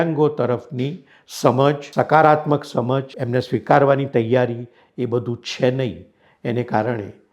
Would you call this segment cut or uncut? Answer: cut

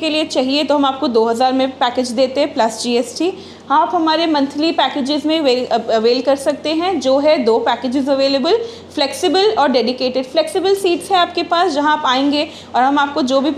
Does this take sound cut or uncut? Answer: uncut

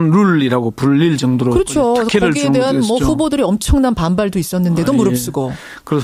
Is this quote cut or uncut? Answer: uncut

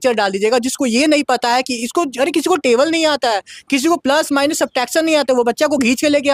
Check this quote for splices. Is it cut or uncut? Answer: uncut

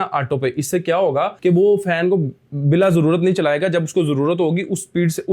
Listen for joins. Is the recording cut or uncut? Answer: uncut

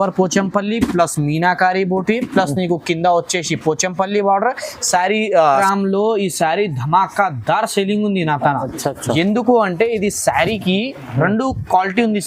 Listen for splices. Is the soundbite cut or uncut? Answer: cut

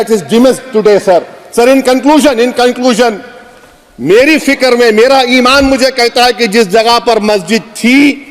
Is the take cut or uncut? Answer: uncut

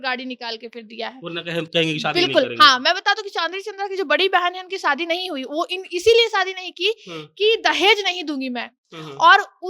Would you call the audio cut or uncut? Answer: uncut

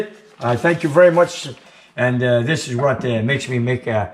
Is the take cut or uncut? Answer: cut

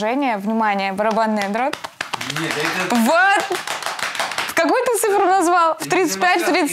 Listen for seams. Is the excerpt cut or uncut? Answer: uncut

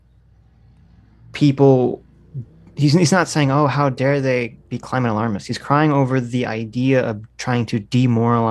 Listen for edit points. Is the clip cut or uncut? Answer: uncut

